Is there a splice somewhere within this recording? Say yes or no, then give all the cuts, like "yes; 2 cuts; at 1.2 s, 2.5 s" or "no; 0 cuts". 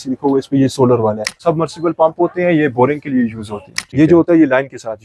yes; 2 cuts; at 1.4 s, 3.9 s